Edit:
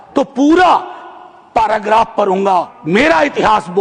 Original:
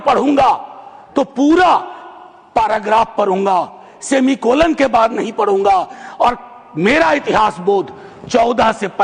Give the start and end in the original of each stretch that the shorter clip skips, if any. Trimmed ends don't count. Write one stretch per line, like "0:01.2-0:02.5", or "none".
0:03.8-0:06.7